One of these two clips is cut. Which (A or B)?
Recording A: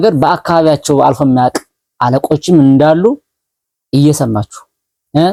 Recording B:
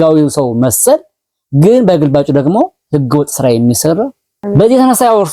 B